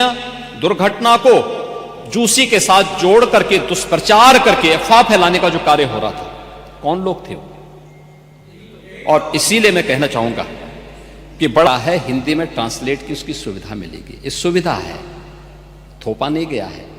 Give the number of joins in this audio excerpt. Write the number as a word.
one